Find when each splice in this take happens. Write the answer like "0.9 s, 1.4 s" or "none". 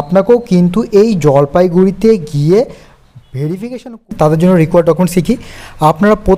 4.1 s